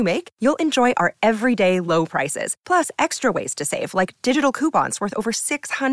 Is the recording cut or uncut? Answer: uncut